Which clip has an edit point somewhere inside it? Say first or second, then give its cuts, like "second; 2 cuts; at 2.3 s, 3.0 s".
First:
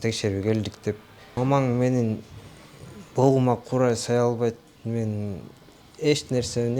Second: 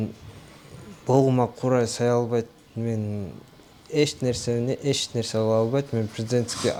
first; 1 cut; at 1.2 s